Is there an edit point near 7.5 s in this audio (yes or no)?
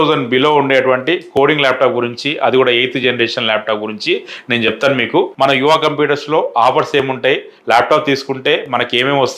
no